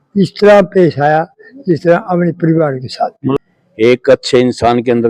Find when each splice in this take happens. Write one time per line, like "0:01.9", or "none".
0:03.4